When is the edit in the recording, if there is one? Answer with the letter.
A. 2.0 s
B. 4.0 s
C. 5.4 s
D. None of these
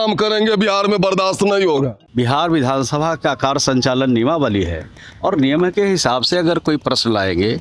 A